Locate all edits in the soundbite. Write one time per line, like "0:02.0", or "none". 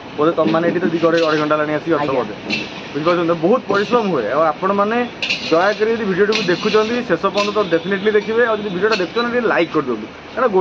none